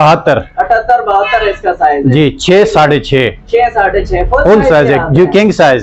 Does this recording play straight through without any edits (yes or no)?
yes